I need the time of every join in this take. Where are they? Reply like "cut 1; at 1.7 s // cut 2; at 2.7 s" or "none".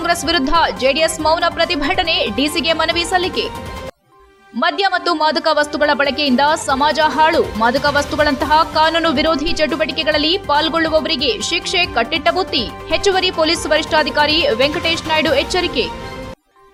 none